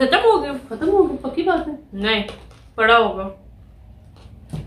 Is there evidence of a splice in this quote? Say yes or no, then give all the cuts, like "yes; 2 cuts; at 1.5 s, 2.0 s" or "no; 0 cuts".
no; 0 cuts